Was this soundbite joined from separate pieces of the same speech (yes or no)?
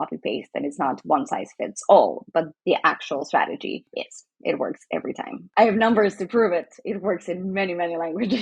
no